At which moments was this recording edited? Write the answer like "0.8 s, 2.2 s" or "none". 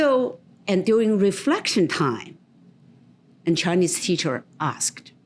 none

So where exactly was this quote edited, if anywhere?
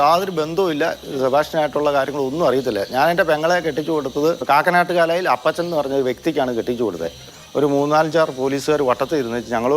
4.4 s, 7.3 s

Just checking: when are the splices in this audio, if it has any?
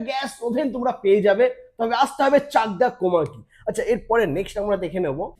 none

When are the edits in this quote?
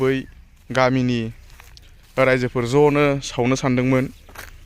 none

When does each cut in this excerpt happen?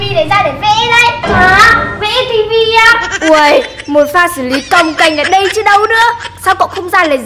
3.1 s

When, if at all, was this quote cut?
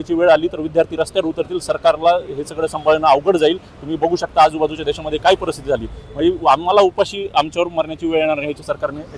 none

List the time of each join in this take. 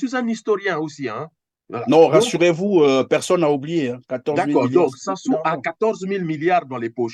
none

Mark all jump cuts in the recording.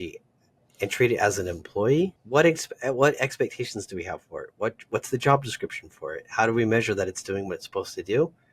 2.2 s

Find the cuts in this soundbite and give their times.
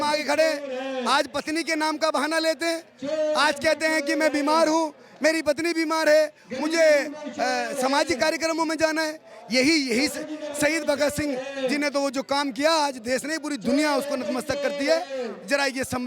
none

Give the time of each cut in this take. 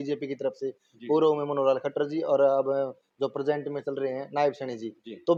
none

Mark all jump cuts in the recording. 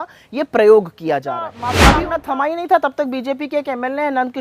1.8 s

